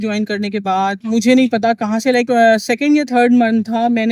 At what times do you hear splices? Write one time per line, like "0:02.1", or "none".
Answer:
none